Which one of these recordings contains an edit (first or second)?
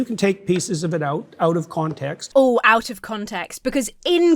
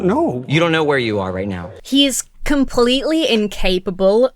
second